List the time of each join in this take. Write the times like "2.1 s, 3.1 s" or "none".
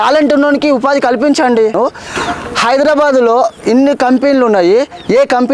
1.8 s